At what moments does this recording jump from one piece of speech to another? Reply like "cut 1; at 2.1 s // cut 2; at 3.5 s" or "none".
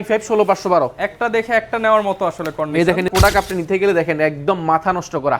cut 1; at 3.1 s